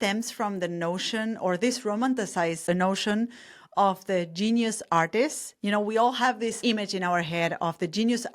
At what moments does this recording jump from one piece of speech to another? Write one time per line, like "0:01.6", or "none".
0:02.6
0:06.6